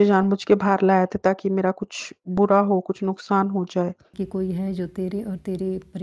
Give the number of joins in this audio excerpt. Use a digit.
1